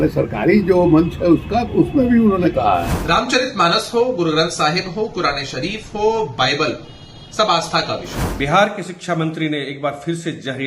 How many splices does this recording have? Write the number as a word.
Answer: two